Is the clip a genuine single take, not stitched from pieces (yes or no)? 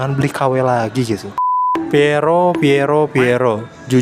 no